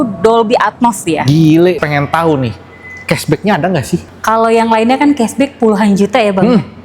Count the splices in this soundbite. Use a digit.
2